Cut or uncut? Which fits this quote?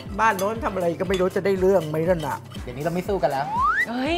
cut